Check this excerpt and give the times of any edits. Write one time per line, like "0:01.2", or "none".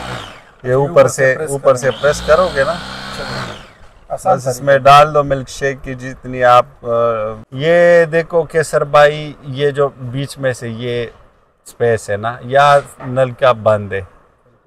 0:07.4